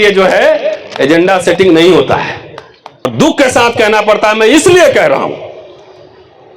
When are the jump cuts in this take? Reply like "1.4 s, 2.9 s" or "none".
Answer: 3.1 s